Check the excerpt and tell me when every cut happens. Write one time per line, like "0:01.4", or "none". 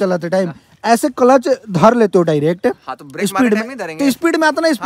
none